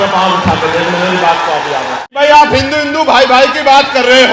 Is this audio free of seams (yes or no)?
no